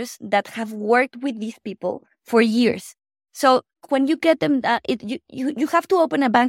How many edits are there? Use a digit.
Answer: 1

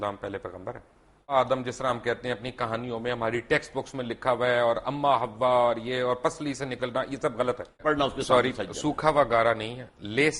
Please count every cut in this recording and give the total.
2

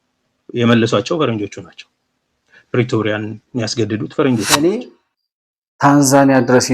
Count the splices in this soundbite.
1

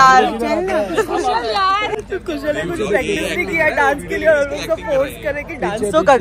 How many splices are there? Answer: 1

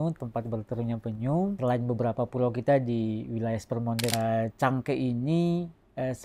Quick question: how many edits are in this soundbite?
2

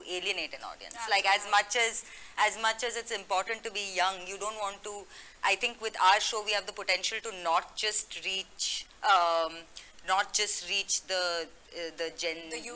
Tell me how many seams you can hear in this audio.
0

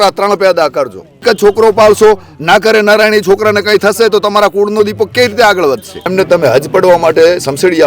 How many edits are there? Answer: 2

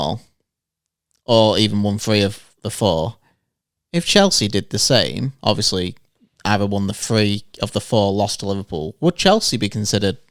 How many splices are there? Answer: 0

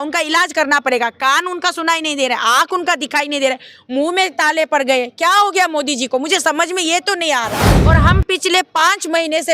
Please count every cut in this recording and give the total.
1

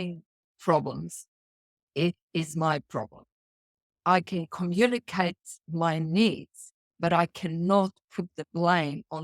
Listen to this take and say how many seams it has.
1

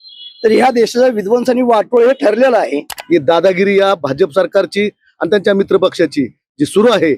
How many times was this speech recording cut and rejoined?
1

